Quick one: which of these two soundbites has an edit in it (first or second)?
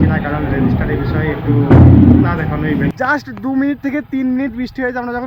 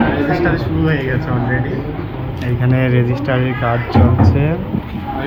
first